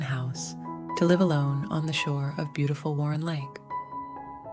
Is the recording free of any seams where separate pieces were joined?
yes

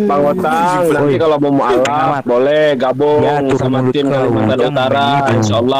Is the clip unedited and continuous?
yes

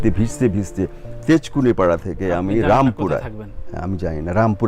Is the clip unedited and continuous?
yes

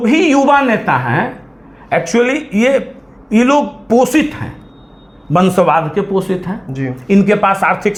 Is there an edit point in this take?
no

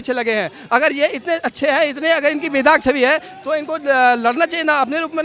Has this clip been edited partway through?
no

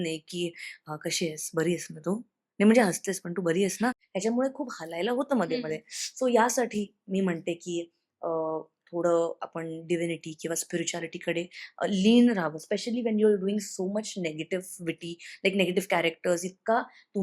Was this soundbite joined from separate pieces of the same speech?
yes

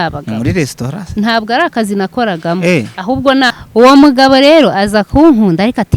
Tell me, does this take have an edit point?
yes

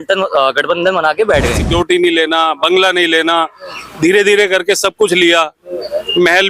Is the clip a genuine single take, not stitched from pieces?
no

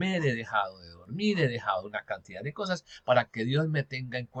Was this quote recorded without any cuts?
yes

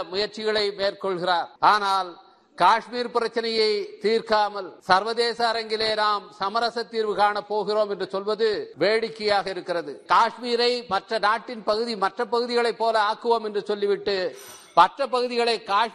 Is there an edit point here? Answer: yes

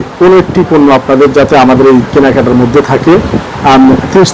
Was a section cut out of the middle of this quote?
no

